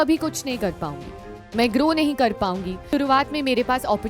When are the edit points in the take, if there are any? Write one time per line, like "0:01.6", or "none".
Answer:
0:02.9